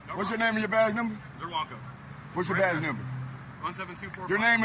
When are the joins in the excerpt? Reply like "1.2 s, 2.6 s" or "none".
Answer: none